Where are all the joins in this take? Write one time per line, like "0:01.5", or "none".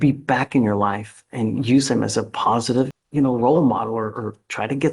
0:03.0